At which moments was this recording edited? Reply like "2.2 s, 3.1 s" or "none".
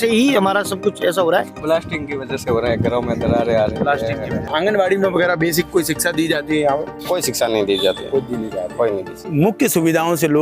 1.5 s, 4.5 s, 9.1 s